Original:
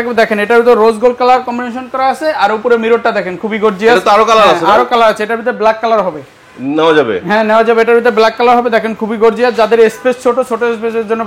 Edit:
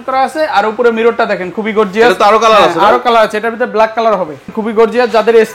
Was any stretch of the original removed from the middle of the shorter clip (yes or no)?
yes